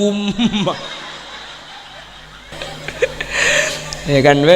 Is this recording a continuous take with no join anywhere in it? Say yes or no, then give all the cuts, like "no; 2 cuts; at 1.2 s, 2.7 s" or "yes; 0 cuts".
no; 1 cut; at 2.5 s